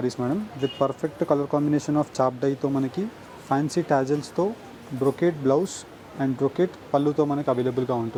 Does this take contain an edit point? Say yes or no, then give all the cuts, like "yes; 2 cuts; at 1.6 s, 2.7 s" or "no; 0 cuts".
no; 0 cuts